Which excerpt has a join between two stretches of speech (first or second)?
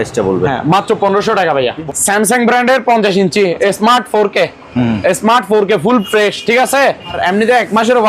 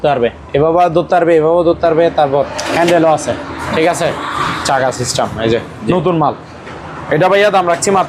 first